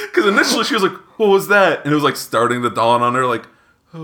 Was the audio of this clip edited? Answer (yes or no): no